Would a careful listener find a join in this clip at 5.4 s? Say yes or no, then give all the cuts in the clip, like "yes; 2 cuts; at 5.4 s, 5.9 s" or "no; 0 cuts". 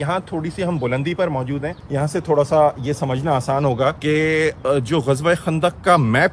no; 2 cuts; at 1.8 s, 4.0 s